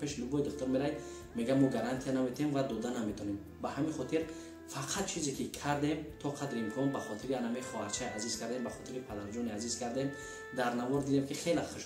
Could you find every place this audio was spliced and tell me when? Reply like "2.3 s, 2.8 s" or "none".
none